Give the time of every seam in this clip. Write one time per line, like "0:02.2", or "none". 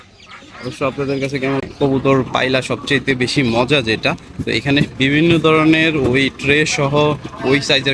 0:01.6